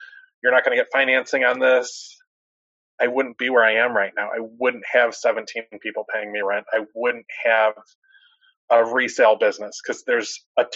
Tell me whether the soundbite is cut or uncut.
uncut